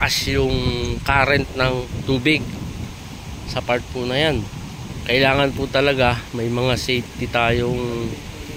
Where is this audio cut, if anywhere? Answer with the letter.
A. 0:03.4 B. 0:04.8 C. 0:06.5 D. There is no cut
B